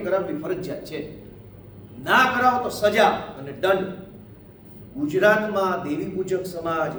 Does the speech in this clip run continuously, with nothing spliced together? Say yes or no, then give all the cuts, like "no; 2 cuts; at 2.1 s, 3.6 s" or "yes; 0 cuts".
yes; 0 cuts